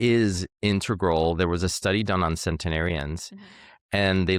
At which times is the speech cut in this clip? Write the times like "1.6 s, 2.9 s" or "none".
none